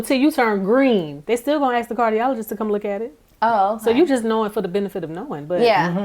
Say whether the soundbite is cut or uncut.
cut